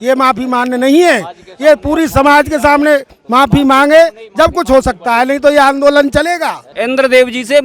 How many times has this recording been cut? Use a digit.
1